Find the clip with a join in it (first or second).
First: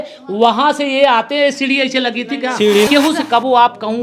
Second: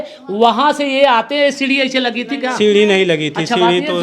first